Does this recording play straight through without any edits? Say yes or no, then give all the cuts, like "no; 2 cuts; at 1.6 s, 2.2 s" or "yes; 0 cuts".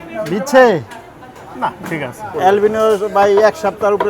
no; 1 cut; at 2.3 s